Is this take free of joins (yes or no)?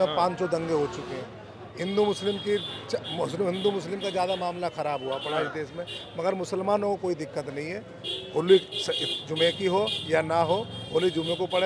yes